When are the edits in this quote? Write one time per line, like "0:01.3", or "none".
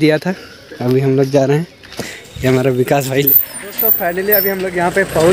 0:03.3